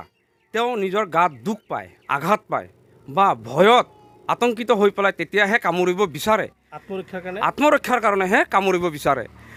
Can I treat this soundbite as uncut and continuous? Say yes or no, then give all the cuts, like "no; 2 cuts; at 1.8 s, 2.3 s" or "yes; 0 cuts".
yes; 0 cuts